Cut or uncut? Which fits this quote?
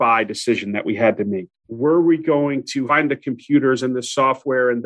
cut